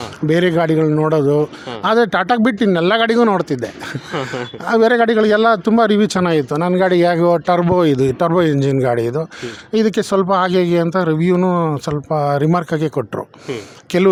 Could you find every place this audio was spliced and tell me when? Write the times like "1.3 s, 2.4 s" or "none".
none